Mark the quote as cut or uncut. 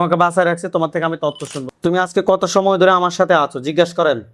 cut